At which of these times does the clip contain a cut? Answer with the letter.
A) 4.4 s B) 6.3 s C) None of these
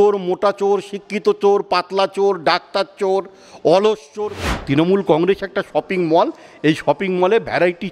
A